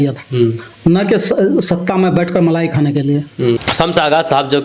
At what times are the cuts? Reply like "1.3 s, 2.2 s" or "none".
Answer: 3.6 s